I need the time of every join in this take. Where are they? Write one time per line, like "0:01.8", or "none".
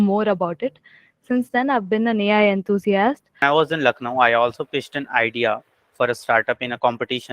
0:03.4

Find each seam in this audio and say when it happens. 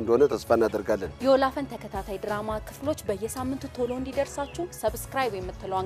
none

